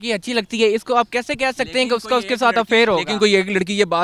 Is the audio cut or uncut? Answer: uncut